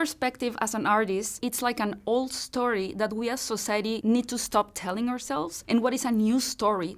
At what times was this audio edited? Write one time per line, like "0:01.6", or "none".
0:01.4
0:04.0

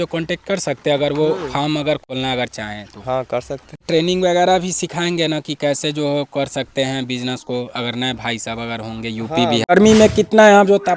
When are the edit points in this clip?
0:02.1
0:03.9
0:09.6

